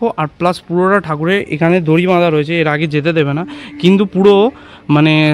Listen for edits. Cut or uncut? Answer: uncut